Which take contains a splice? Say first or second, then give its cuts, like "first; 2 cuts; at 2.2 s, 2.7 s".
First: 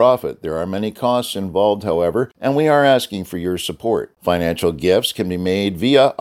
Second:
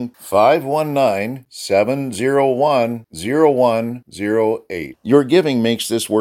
first; 1 cut; at 2.3 s